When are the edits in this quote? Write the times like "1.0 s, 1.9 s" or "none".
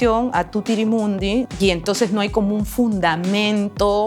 1.5 s